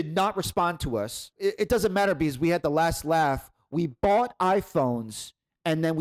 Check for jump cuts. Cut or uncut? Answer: uncut